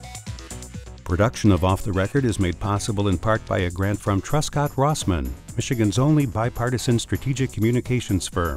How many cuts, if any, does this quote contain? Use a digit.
1